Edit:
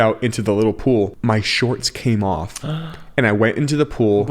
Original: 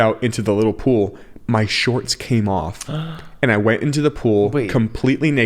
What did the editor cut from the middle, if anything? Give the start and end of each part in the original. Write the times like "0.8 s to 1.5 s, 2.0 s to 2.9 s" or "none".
1.1 s to 1.4 s